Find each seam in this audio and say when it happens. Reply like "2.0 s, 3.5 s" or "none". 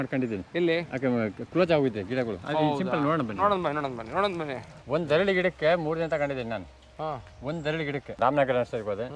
4.7 s, 8.2 s